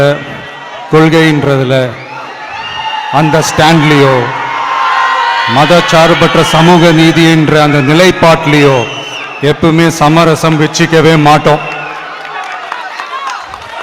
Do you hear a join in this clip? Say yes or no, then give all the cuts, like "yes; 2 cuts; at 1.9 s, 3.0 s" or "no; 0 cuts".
no; 0 cuts